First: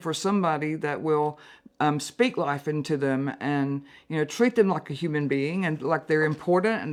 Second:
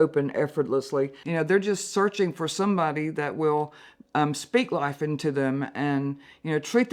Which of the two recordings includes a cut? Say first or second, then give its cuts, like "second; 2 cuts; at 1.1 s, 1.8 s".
second; 1 cut; at 1.2 s